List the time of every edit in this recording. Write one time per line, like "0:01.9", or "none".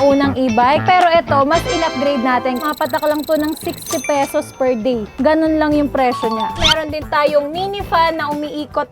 0:02.6
0:06.6